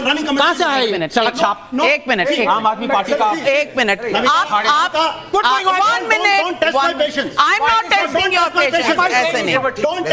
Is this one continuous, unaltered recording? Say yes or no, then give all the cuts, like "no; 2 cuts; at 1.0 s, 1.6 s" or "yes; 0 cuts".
yes; 0 cuts